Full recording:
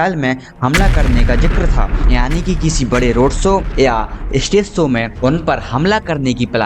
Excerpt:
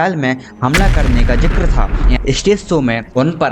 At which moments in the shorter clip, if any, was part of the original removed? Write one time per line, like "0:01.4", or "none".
0:02.1